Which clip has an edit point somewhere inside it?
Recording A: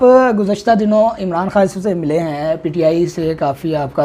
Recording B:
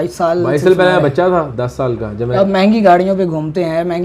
B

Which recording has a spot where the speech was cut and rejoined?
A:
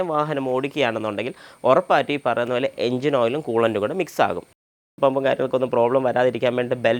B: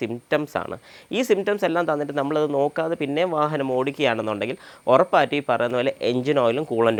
A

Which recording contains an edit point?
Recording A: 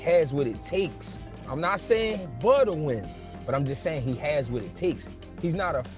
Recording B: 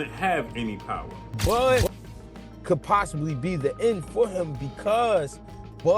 B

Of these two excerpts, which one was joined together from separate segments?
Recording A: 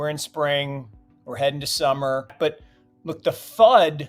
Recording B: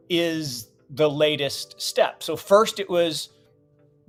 A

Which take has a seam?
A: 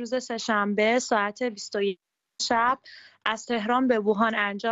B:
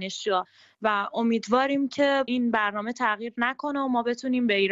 B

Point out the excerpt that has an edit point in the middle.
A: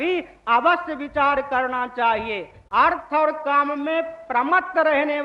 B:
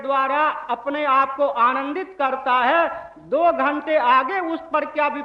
A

